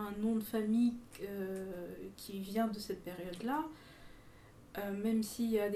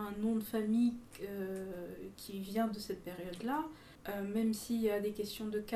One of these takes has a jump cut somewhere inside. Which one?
second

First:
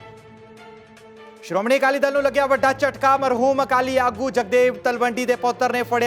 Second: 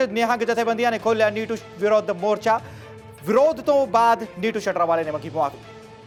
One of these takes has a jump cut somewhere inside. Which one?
first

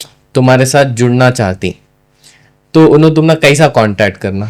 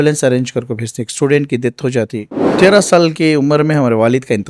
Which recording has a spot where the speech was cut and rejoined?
second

